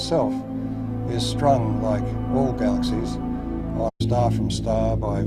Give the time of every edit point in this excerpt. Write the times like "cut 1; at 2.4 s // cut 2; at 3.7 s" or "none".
none